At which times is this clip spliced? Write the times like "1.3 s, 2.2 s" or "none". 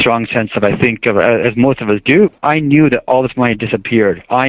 none